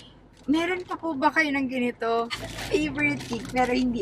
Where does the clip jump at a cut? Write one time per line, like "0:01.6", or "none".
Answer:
0:02.4